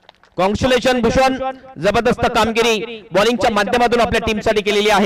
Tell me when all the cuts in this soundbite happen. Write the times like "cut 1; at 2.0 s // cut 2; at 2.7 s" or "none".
none